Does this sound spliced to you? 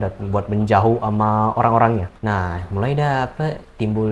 yes; 1 cut; at 2.1 s

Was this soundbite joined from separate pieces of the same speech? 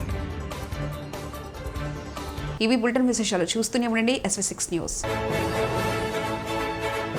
no; 0 cuts

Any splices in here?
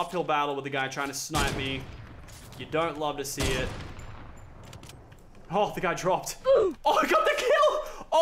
no; 0 cuts

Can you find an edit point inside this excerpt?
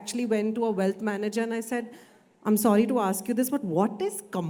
no; 0 cuts

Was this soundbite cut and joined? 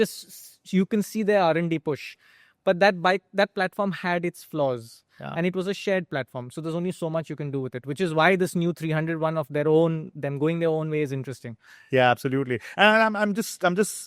no; 0 cuts

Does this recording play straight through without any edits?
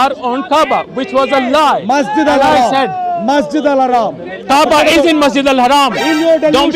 yes; 0 cuts

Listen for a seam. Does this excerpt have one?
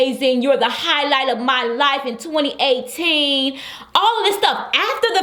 no; 0 cuts

